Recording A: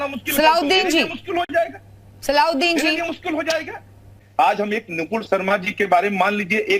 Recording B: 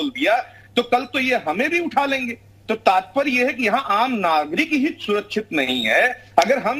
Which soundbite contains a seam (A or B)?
A